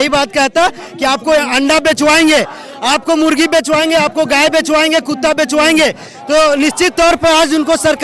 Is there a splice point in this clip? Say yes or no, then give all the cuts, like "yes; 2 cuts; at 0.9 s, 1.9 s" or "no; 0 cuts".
no; 0 cuts